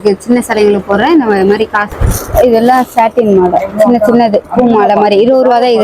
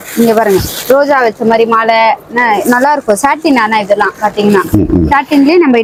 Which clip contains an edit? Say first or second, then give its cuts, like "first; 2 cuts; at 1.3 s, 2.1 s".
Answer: first; 1 cut; at 1.8 s